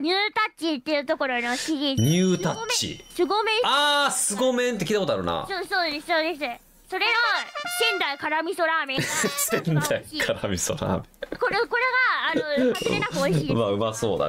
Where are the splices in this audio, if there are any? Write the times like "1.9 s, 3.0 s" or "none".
none